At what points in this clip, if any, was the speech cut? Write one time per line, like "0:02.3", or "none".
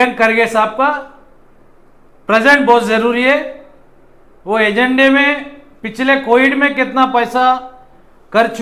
none